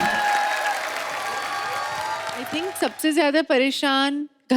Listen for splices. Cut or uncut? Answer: cut